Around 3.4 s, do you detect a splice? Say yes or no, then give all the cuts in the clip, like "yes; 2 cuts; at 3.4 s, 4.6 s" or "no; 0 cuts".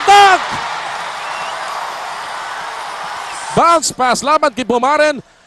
yes; 1 cut; at 3.4 s